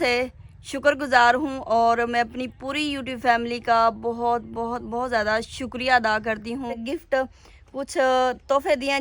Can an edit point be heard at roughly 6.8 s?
yes; 1 cut; at 6.8 s

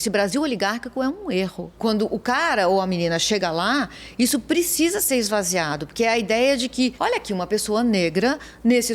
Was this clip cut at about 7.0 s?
yes; 2 cuts; at 1.7 s, 7.0 s

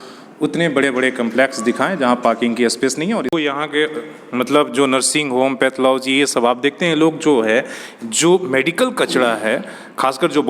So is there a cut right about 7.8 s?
no; 1 cut; at 3.4 s

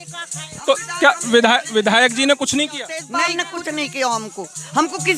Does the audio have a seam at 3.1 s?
yes; 1 cut; at 3.1 s

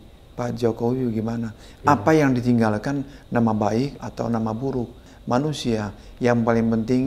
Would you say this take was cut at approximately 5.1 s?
yes; 2 cuts; at 4.0 s, 5.1 s

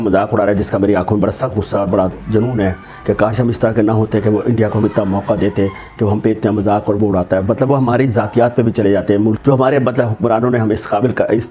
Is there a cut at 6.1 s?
no; 1 cut; at 9.4 s

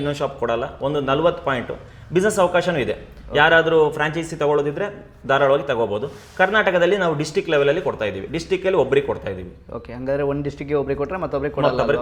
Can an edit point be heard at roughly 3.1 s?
no; 0 cuts

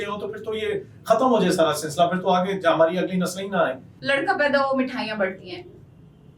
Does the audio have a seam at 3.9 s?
yes; 1 cut; at 3.9 s

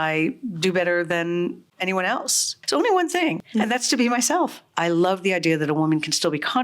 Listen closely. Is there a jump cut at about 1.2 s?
no; 3 cuts; at 2.5 s, 3.4 s, 4.6 s

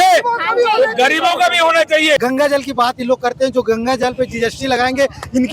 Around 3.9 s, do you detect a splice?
no; 1 cut; at 2.2 s

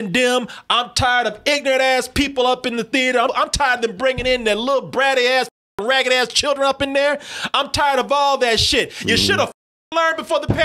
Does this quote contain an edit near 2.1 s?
no; 1 cut; at 3.3 s

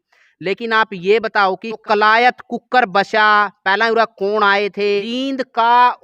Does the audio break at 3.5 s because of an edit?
no; 2 cuts; at 1.8 s, 5.1 s

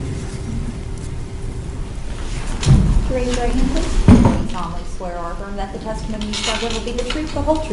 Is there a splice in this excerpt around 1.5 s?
yes; 1 cut; at 1.5 s

